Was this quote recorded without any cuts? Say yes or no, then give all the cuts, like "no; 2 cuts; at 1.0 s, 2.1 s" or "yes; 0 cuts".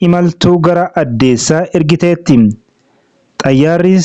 yes; 0 cuts